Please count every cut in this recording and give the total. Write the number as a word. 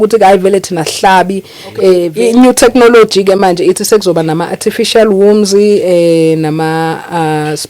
one